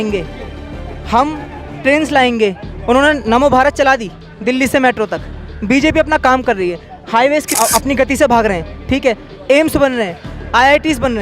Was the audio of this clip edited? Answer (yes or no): yes